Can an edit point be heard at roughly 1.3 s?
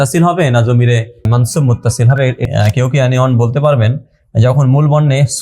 yes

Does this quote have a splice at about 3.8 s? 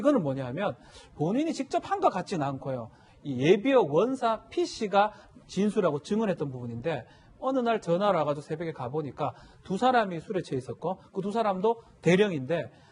no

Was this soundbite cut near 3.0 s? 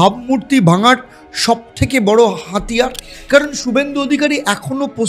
yes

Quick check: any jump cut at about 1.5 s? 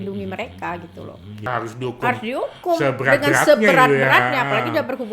yes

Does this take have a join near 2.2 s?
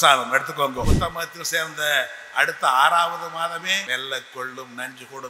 no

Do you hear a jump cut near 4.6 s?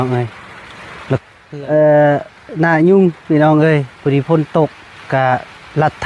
no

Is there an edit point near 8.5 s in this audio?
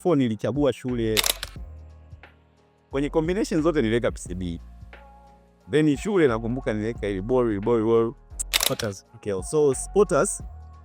yes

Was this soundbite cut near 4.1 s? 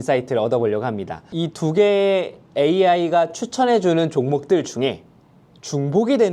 no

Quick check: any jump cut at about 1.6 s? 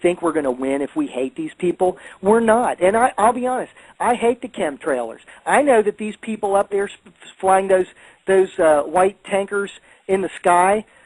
no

